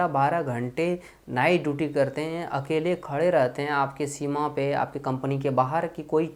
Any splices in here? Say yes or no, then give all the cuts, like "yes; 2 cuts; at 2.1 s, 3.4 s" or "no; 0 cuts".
no; 0 cuts